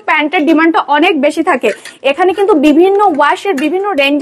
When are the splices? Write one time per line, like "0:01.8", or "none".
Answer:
none